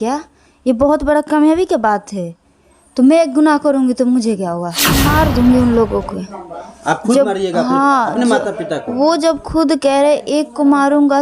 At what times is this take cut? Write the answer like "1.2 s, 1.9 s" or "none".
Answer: 5.1 s